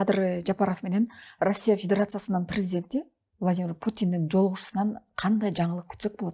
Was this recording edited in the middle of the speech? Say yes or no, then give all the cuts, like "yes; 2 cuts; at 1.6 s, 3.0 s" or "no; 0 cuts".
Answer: no; 0 cuts